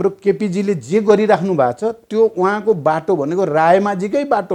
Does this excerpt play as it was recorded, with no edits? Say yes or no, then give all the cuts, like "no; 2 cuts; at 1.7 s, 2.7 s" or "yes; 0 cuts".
yes; 0 cuts